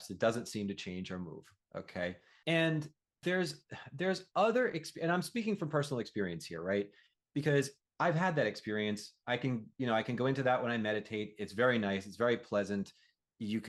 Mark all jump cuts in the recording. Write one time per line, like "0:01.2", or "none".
0:02.3
0:03.0